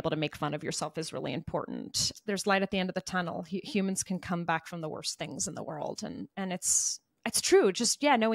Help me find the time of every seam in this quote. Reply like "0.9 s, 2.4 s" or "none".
2.1 s